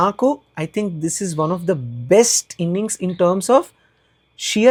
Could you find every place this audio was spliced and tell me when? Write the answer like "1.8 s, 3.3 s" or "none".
none